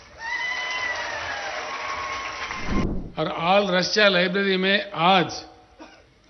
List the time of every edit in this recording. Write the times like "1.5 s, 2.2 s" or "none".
2.8 s